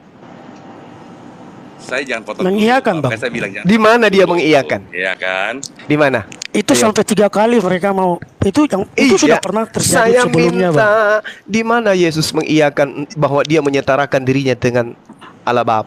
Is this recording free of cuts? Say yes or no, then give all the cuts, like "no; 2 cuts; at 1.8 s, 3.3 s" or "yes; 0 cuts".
yes; 0 cuts